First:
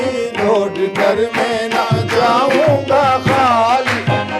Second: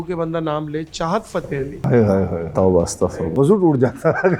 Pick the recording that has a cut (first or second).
second